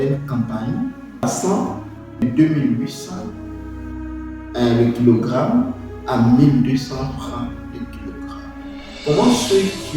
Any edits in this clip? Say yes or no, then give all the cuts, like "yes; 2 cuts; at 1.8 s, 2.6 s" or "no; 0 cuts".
yes; 2 cuts; at 1.2 s, 2.2 s